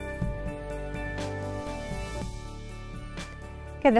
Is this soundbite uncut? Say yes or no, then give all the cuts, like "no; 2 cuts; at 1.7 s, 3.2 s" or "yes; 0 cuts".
yes; 0 cuts